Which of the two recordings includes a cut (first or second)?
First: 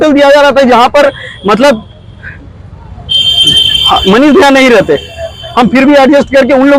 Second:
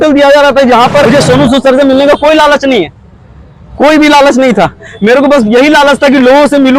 second